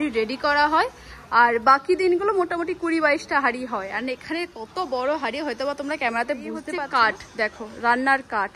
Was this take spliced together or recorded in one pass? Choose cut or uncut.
cut